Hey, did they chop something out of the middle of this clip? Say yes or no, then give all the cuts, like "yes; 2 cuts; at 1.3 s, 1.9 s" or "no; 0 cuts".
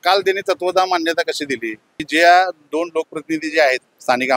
yes; 1 cut; at 2.0 s